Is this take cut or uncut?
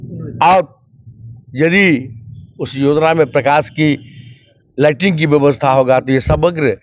uncut